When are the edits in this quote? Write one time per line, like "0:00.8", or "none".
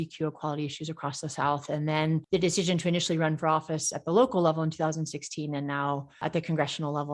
0:02.2
0:06.2